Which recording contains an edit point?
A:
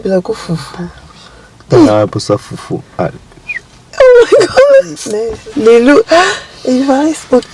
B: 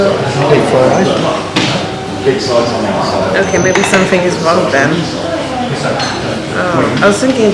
A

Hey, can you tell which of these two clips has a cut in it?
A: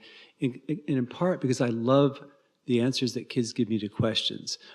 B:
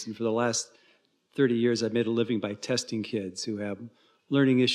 A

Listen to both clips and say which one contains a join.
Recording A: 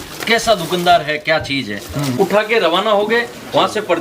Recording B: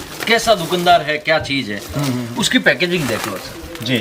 A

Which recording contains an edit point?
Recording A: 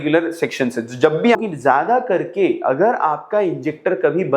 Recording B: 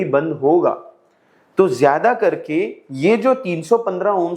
A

